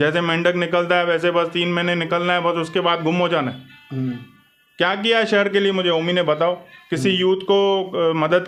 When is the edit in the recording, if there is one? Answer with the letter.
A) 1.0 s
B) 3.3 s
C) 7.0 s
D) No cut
D